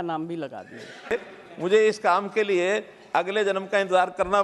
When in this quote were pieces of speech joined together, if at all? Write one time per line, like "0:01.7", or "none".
0:01.1